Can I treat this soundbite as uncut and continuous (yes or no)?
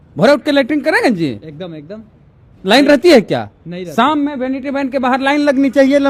yes